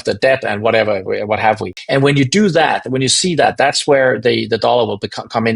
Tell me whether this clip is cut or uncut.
cut